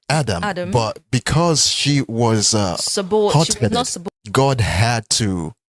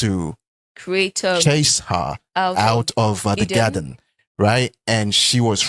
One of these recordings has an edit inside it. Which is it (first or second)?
first